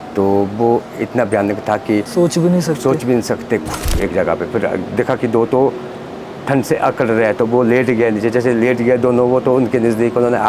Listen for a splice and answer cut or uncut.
cut